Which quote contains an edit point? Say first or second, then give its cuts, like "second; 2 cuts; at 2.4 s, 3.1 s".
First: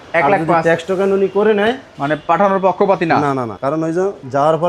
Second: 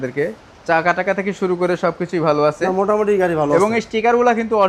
first; 2 cuts; at 1.9 s, 3.7 s